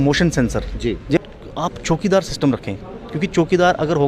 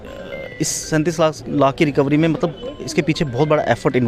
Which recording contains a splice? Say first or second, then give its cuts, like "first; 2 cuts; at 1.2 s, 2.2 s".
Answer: first; 1 cut; at 1.2 s